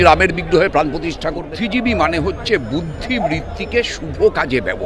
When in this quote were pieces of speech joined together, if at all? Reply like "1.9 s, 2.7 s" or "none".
1.5 s